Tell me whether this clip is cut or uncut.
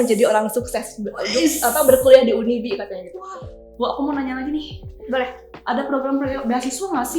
cut